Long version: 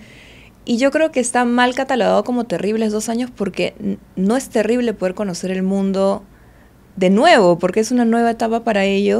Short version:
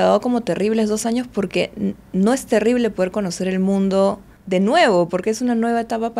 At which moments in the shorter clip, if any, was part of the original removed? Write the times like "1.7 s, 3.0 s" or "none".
4.3 s